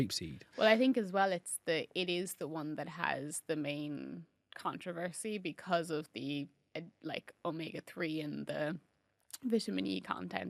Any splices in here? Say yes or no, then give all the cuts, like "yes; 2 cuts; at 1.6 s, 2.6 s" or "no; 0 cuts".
no; 0 cuts